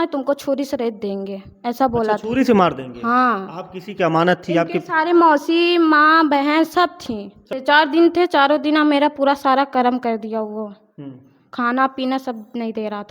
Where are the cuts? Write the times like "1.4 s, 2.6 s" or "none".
7.5 s